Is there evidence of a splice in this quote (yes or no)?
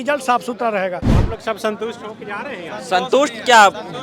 yes